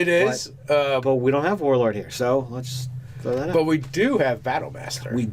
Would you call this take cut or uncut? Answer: uncut